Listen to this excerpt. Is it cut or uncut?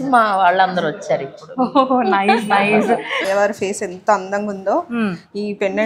cut